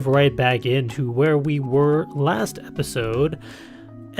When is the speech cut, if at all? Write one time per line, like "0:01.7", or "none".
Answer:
0:03.0